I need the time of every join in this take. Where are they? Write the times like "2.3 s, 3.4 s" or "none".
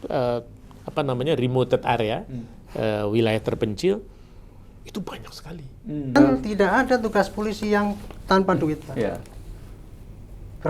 6.2 s